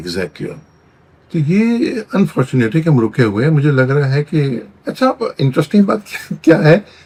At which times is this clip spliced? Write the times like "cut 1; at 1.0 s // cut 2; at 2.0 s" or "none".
none